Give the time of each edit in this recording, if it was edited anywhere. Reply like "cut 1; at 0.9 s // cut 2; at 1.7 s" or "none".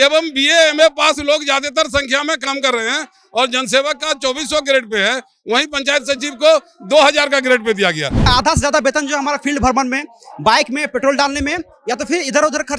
cut 1; at 8.3 s